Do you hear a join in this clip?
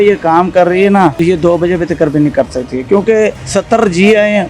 yes; 2 cuts; at 1.2 s, 3.4 s

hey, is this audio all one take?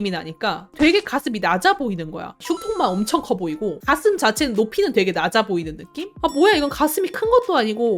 yes; 0 cuts

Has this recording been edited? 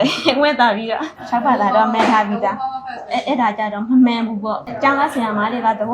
yes; 2 cuts; at 1.2 s, 4.7 s

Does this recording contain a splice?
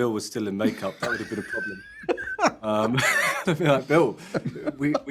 no; 0 cuts

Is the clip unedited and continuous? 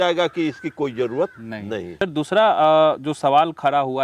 yes; 0 cuts

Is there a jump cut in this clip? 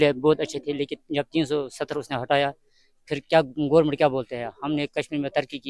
no; 0 cuts

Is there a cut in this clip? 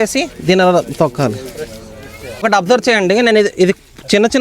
yes; 1 cut; at 2.4 s

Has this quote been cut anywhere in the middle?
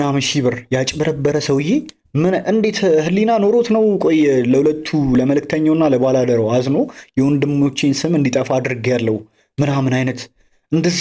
no; 0 cuts

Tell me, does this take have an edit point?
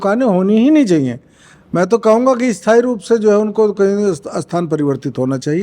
no; 0 cuts

